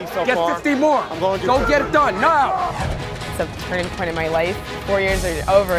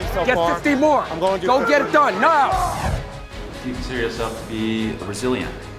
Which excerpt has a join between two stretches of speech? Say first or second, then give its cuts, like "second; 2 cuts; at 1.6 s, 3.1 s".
first; 2 cuts; at 2.7 s, 4.7 s